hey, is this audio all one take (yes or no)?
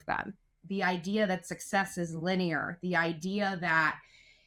yes